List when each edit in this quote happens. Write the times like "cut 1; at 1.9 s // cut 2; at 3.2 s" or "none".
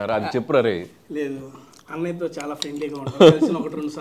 none